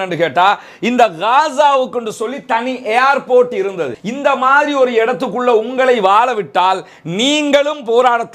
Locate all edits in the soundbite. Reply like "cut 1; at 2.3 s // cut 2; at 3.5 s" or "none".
cut 1; at 4.0 s